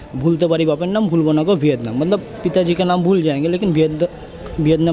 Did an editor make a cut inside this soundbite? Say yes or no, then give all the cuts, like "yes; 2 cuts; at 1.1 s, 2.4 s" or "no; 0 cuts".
no; 0 cuts